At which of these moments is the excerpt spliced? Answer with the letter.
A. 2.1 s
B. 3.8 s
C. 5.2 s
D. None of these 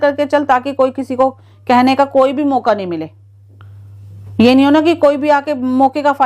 D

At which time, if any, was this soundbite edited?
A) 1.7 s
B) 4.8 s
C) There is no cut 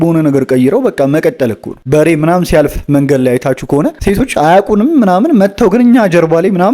A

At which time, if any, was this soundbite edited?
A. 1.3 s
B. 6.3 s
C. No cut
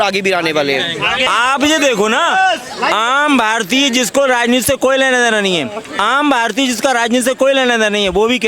A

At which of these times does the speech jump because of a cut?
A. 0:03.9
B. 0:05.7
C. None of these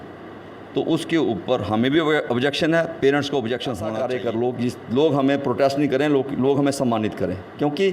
A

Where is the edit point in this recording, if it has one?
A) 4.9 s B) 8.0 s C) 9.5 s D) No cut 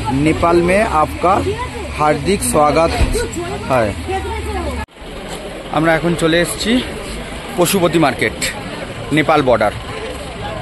A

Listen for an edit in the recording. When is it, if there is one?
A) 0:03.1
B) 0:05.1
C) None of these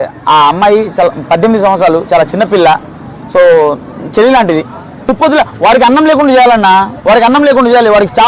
B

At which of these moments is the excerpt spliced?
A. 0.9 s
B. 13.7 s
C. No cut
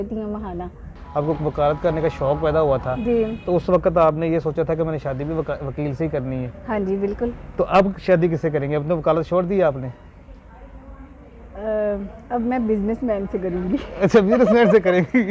A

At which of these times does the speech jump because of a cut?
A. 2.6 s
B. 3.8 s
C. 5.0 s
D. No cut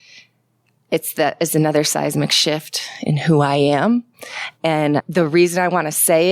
C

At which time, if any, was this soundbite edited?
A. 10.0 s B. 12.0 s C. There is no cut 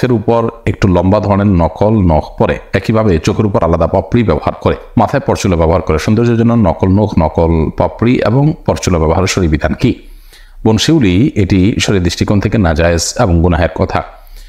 C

